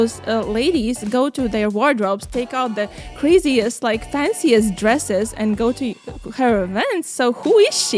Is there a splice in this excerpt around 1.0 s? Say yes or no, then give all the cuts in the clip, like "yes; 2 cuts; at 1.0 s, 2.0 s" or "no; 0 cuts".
no; 0 cuts